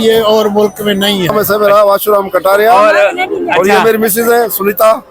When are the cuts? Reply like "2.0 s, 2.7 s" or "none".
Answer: 1.3 s

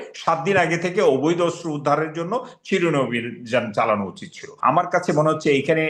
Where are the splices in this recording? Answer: 4.4 s

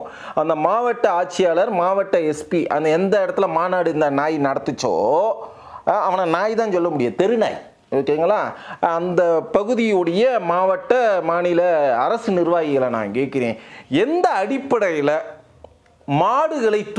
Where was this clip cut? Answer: none

